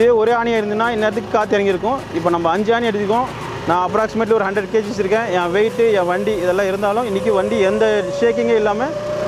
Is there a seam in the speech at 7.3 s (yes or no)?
no